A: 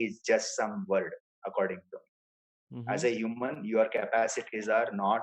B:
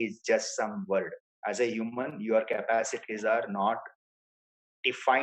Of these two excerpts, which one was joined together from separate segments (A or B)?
B